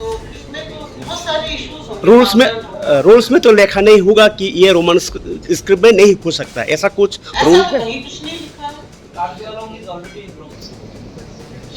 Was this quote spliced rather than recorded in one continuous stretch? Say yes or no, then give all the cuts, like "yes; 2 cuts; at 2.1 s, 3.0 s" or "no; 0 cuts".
yes; 1 cut; at 10.5 s